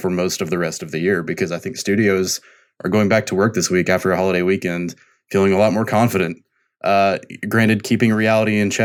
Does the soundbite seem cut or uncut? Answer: uncut